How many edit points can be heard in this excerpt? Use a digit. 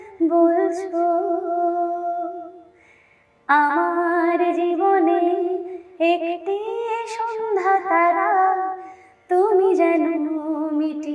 0